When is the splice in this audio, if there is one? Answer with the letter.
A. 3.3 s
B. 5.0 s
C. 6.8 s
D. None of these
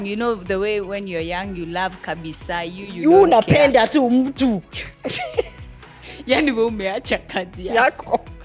D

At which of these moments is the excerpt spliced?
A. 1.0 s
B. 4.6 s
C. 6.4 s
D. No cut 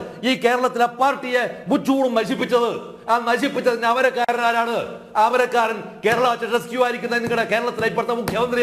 D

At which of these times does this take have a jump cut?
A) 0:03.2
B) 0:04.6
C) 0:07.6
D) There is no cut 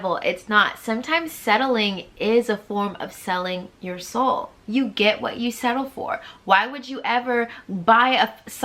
B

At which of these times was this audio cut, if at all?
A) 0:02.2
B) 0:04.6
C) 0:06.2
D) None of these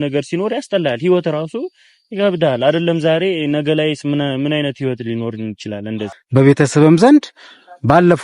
C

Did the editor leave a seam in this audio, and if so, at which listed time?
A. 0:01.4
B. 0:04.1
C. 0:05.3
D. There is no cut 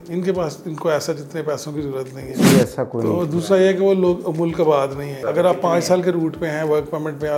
C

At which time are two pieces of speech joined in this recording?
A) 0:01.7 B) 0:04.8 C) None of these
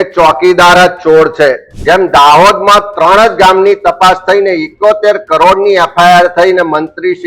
A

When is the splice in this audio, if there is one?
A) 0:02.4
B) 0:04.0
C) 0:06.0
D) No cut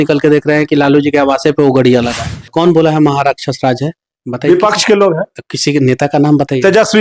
A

